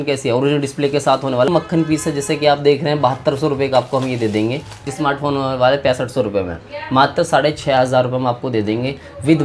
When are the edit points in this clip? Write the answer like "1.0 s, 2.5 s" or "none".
1.5 s, 4.9 s